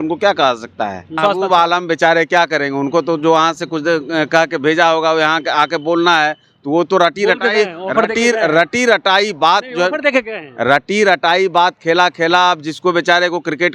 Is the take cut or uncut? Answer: cut